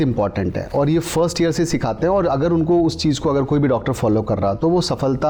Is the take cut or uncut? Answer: uncut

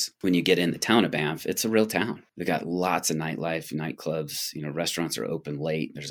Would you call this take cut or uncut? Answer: uncut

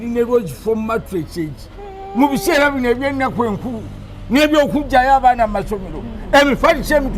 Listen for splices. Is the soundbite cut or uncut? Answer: uncut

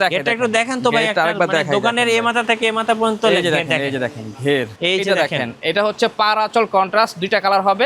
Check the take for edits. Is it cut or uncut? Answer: cut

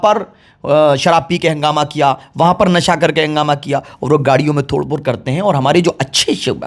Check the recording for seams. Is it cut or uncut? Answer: uncut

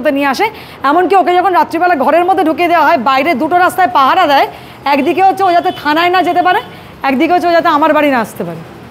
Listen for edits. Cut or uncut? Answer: uncut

